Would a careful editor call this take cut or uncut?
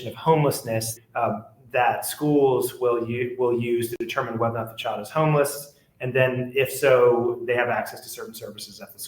cut